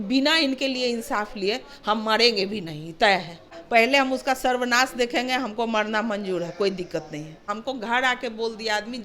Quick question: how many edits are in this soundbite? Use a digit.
2